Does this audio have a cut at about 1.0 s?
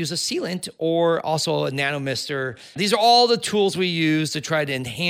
no; 1 cut; at 2.7 s

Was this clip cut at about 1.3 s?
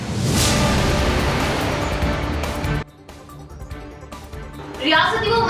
no; 0 cuts

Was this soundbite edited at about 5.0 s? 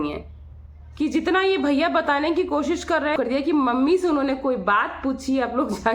no; 1 cut; at 3.1 s

